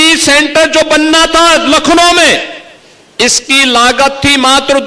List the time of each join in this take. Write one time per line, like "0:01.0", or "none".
none